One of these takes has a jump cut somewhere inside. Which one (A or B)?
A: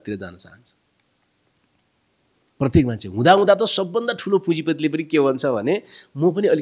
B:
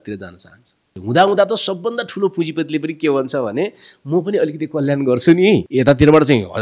B